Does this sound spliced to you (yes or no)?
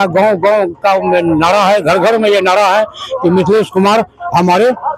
no